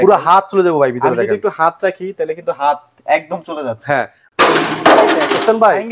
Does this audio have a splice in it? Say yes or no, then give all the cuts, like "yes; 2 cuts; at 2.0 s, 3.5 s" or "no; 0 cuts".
yes; 1 cut; at 4.3 s